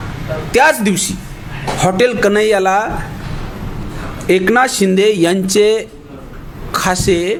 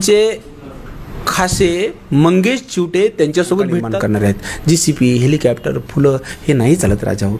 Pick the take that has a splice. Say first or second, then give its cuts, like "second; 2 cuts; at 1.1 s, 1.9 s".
second; 1 cut; at 3.9 s